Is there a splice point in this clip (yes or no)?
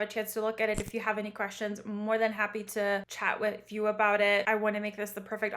yes